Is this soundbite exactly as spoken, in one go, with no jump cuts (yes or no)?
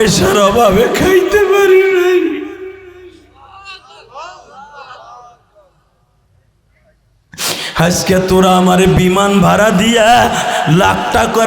yes